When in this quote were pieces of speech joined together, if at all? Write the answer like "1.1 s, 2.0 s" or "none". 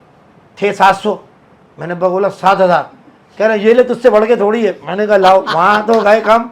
none